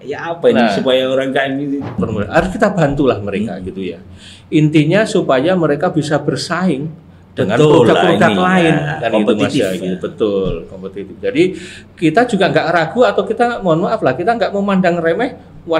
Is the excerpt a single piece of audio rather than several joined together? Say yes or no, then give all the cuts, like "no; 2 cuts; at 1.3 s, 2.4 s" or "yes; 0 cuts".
no; 1 cut; at 2.0 s